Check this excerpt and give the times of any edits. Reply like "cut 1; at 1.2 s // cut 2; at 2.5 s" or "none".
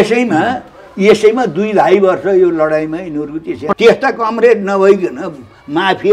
cut 1; at 3.7 s